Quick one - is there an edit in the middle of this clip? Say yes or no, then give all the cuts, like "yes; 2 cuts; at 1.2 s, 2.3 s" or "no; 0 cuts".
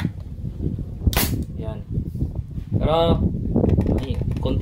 no; 0 cuts